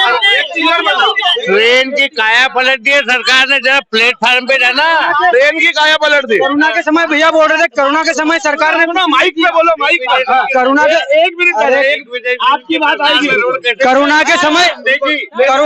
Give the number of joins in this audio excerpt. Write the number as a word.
zero